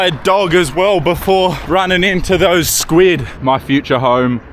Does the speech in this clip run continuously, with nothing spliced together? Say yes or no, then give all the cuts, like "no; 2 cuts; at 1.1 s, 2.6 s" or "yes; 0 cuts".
no; 2 cuts; at 1.6 s, 3.3 s